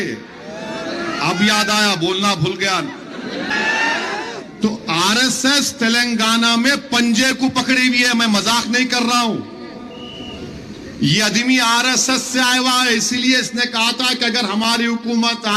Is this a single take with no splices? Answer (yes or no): no